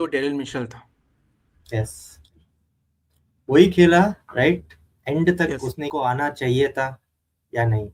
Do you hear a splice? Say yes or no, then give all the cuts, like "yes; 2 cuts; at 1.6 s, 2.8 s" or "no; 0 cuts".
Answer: yes; 1 cut; at 5.9 s